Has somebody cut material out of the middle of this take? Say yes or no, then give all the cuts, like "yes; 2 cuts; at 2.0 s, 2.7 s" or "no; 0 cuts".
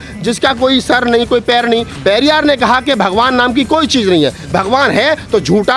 yes; 1 cut; at 1.9 s